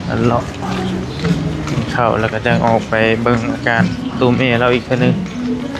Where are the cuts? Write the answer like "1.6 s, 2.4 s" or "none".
none